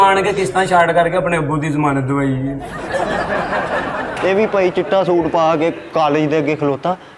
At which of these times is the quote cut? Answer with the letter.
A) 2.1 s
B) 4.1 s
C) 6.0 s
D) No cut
B